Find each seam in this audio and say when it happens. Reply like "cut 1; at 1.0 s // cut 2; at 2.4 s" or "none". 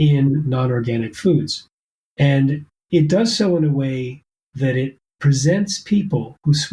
cut 1; at 5.0 s